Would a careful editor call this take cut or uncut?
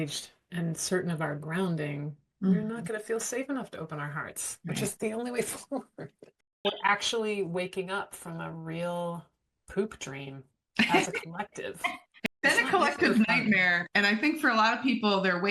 cut